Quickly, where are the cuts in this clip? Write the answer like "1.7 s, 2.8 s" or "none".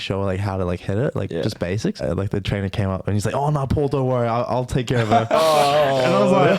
2.0 s